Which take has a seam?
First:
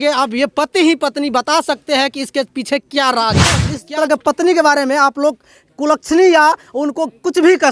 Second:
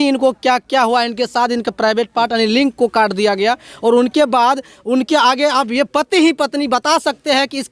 first; 1 cut; at 3.7 s

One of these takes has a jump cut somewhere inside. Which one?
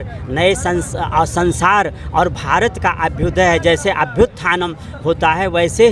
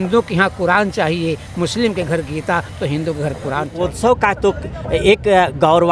second; 1 cut; at 3.8 s

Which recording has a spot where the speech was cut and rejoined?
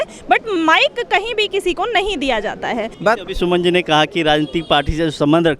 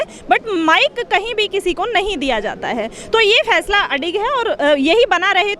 first; 1 cut; at 2.9 s

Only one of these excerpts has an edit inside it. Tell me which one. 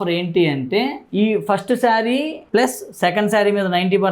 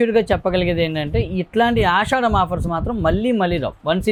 first; 2 cuts; at 1.0 s, 2.4 s

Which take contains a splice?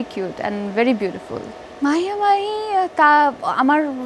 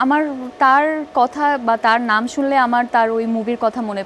first; 1 cut; at 1.6 s

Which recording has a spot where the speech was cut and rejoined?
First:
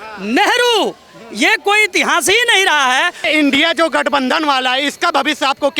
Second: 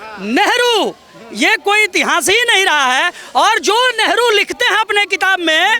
first; 1 cut; at 3.2 s

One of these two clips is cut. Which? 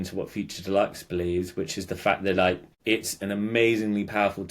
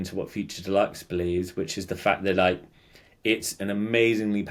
first; 1 cut; at 2.7 s

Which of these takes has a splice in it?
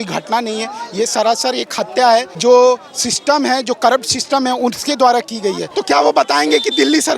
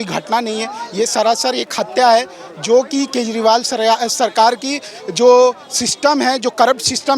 first; 2 cuts; at 2.3 s, 5.7 s

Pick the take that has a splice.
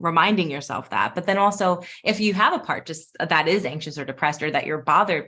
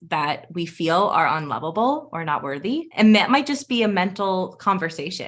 second; 1 cut; at 2.9 s

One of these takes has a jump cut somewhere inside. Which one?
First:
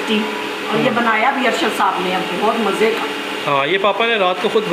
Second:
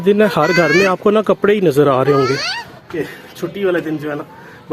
second; 1 cut; at 2.9 s

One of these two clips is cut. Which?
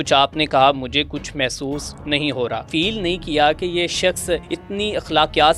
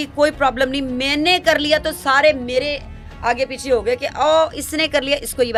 first; 2 cuts; at 2.6 s, 4.5 s

